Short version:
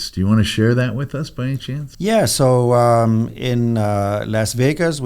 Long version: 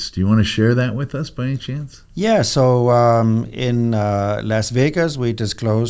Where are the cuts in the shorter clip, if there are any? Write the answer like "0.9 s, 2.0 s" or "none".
1.8 s